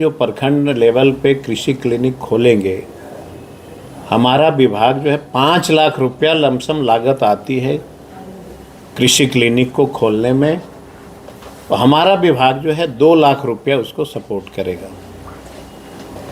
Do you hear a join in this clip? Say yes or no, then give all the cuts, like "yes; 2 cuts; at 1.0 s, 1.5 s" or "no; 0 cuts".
no; 0 cuts